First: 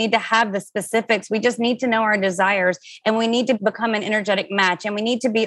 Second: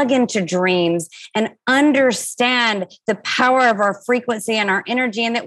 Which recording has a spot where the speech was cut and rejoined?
first; 1 cut; at 3.6 s

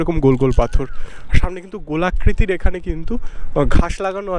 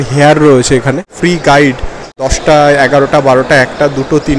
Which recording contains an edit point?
second; 2 cuts; at 1.1 s, 2.3 s

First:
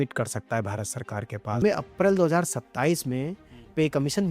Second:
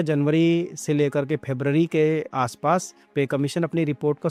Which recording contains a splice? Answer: first; 1 cut; at 1.6 s

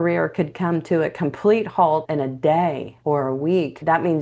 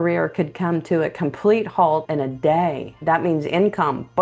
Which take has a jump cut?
second; 1 cut; at 2.9 s

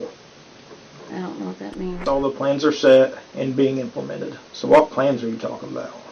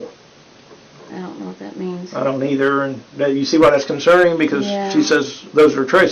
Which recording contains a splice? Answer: first; 1 cut; at 2.0 s

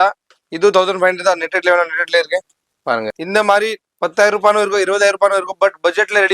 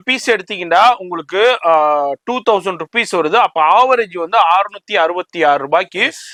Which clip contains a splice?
first; 1 cut; at 3.2 s

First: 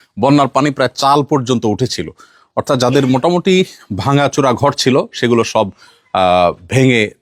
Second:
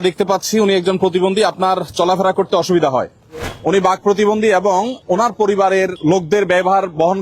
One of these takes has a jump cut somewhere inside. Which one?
second; 3 cuts; at 3.4 s, 5.0 s, 6.0 s

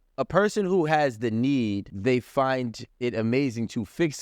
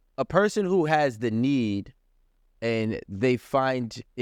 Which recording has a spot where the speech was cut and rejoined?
first; 1 cut; at 1.9 s

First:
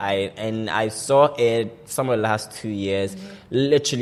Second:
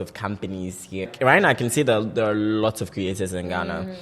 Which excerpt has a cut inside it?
second; 1 cut; at 1.1 s

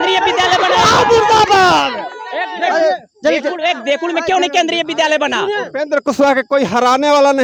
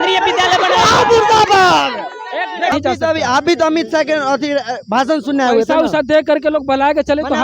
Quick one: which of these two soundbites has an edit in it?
second; 1 cut; at 2.7 s

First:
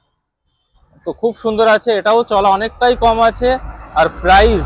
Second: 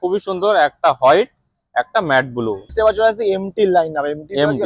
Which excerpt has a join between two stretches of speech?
second; 1 cut; at 2.7 s

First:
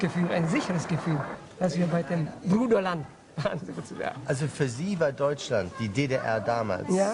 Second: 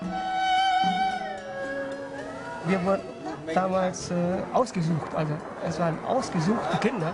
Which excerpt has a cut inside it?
first; 1 cut; at 1.0 s

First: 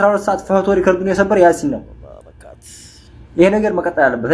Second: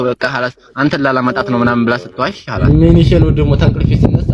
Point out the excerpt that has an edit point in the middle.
second; 1 cut; at 2.6 s

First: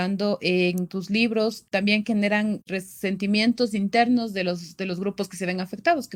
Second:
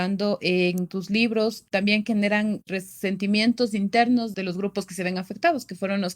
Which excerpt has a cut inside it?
second; 1 cut; at 4.3 s

